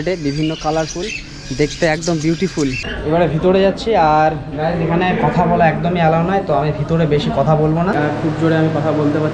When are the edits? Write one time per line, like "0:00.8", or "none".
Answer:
0:03.0
0:07.9